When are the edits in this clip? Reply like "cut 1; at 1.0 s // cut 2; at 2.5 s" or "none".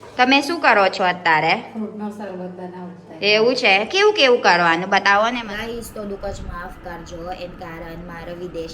cut 1; at 5.4 s